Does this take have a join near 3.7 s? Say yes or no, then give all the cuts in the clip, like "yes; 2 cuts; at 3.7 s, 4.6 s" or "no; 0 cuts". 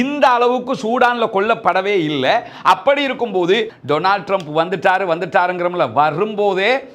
yes; 1 cut; at 3.7 s